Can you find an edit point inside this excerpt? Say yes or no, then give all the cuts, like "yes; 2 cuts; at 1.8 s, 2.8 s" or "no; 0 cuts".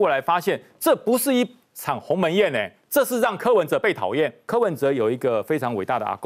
yes; 1 cut; at 4.4 s